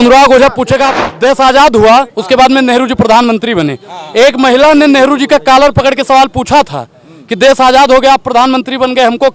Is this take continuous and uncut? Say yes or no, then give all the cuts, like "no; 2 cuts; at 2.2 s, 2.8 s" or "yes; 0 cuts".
no; 1 cut; at 0.9 s